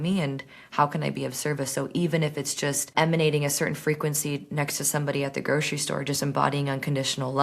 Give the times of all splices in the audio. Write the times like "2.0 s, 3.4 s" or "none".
2.9 s